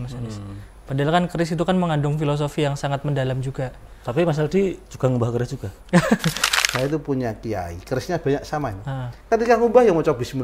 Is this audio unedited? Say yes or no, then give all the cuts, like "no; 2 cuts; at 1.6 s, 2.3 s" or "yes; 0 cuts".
no; 1 cut; at 6.5 s